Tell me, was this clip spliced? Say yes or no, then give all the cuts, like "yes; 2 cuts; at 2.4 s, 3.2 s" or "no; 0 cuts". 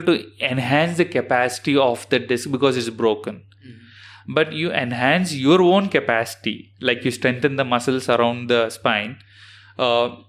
no; 0 cuts